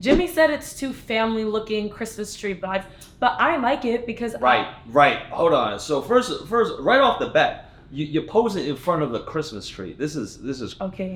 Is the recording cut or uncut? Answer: uncut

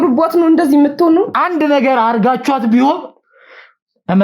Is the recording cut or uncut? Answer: cut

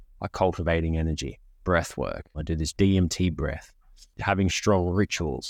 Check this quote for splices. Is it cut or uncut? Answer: cut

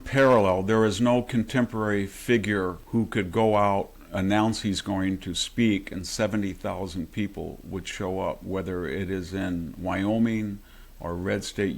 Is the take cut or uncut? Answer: cut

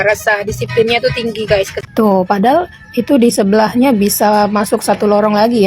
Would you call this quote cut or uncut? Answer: cut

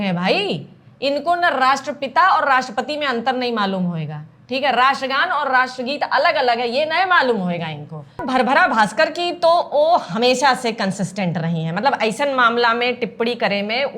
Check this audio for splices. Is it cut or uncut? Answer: cut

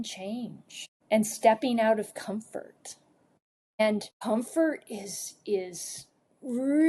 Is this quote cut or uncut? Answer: uncut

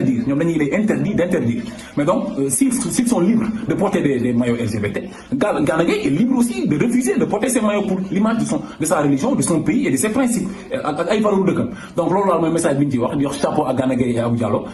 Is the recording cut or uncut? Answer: uncut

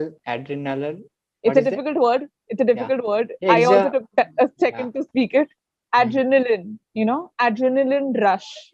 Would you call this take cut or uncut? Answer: uncut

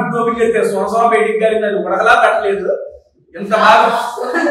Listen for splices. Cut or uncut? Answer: uncut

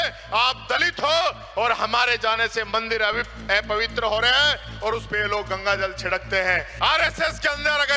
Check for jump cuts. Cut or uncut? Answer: cut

